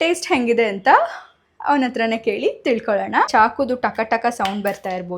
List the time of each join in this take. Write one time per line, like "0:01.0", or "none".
0:03.3